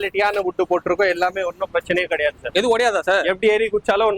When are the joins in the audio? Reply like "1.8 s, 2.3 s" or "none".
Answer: 2.4 s